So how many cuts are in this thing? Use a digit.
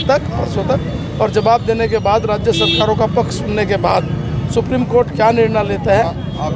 0